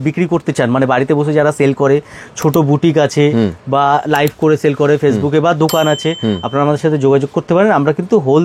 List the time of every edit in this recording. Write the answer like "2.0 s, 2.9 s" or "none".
none